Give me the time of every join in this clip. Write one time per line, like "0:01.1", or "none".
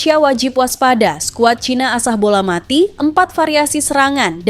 none